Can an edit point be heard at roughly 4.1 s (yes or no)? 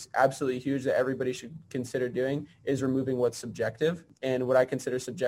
yes